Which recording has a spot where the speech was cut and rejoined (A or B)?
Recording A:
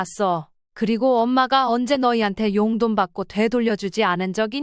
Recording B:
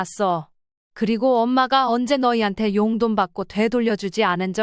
A